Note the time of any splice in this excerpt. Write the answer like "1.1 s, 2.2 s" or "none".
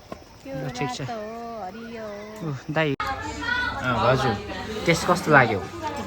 3.0 s

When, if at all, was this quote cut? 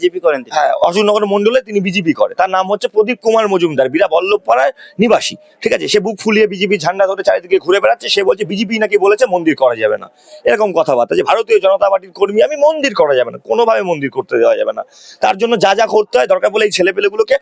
none

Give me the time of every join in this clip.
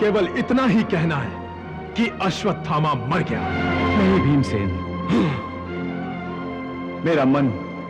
3.5 s

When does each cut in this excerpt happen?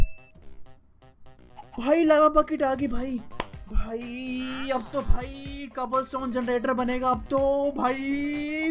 none

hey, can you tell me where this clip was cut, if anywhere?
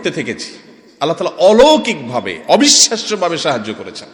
none

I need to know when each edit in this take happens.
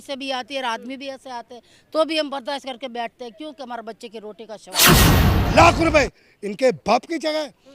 4.9 s

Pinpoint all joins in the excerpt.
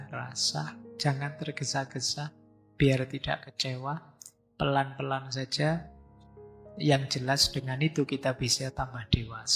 none

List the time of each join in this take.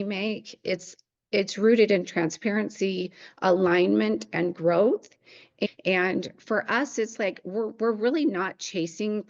5.7 s

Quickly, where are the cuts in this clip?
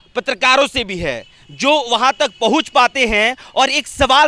none

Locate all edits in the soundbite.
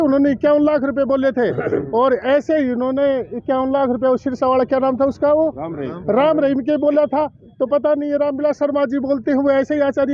none

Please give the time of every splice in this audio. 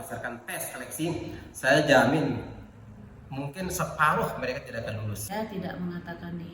5.2 s

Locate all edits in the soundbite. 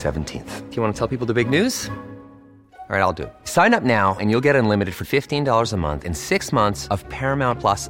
none

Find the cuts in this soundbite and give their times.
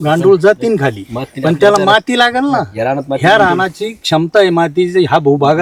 none

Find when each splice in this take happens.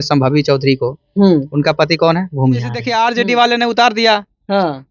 2.8 s

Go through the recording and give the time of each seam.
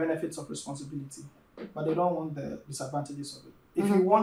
none

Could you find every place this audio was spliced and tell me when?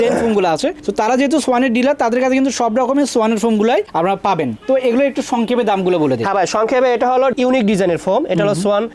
none

